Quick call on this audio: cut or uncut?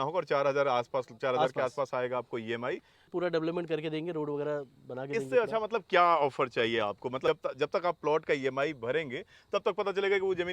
cut